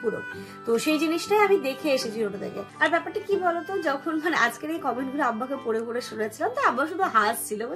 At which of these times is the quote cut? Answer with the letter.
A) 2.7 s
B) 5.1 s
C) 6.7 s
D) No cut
A